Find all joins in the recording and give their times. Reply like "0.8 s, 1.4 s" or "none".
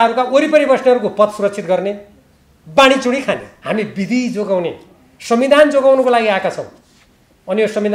3.5 s

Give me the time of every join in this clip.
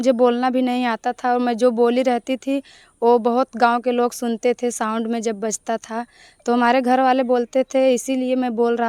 none

